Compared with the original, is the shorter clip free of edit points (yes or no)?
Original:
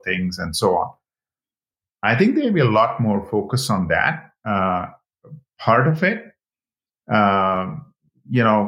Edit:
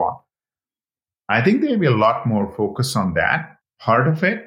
no